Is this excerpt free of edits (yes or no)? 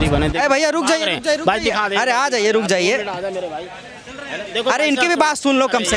yes